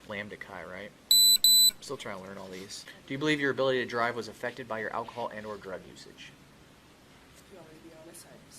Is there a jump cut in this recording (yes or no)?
yes